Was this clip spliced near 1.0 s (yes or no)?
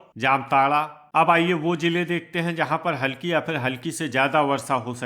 yes